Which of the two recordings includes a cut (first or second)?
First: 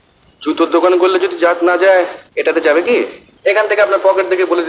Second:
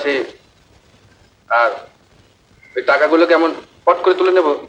first